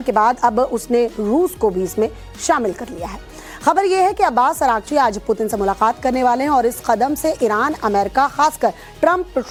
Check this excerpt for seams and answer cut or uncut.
uncut